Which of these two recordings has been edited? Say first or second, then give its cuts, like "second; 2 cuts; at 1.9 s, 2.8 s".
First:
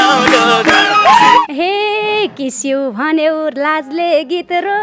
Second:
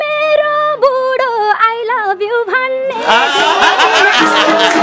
first; 1 cut; at 1.4 s